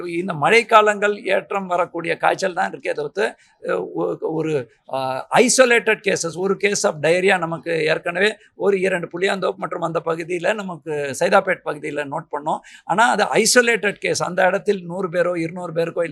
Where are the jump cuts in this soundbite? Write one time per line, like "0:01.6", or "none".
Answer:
none